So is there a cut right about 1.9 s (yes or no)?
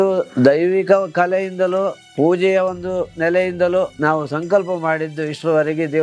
no